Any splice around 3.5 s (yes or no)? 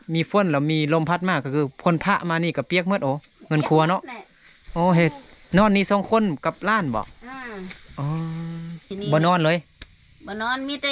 no